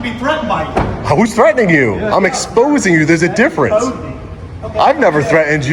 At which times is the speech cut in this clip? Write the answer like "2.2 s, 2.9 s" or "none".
none